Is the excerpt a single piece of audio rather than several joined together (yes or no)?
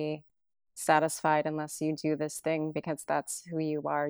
yes